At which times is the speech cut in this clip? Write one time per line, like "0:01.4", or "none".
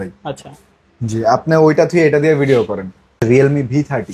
0:03.2